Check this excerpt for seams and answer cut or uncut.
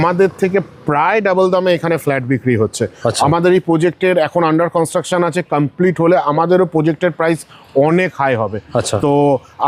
uncut